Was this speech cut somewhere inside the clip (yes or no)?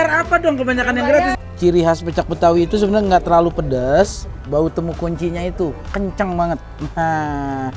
yes